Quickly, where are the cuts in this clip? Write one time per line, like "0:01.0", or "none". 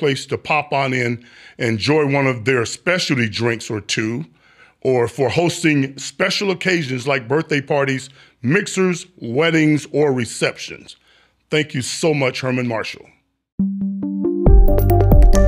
0:13.6